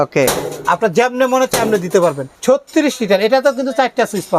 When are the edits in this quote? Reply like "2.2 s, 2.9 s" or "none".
2.3 s